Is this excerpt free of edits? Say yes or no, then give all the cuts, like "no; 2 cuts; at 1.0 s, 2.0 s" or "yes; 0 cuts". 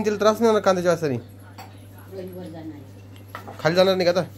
yes; 0 cuts